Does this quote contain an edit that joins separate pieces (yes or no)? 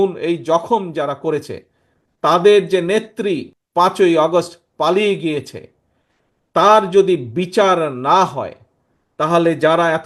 yes